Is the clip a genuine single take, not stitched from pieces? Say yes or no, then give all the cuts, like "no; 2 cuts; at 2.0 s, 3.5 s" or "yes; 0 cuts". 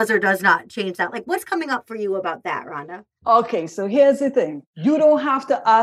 no; 1 cut; at 4.6 s